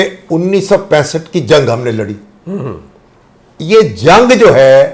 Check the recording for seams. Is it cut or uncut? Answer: uncut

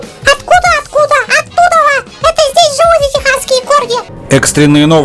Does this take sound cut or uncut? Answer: cut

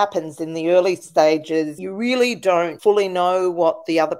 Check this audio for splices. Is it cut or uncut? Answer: cut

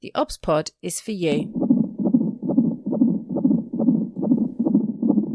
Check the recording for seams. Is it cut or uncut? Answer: cut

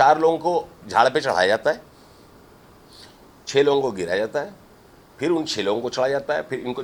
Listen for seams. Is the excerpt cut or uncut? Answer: uncut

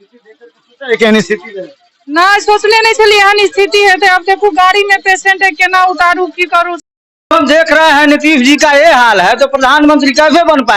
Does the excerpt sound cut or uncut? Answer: cut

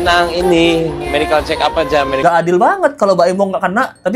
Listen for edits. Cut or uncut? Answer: cut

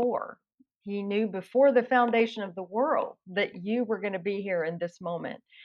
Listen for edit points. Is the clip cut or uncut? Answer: uncut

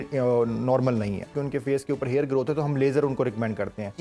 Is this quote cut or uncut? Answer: cut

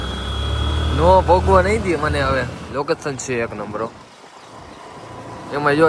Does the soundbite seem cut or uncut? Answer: cut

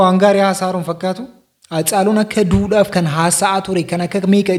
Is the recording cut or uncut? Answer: uncut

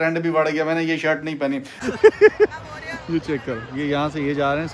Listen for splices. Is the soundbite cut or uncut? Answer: cut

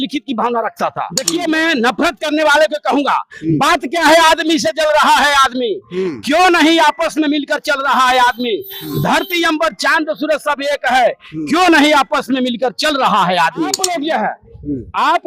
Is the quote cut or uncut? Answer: cut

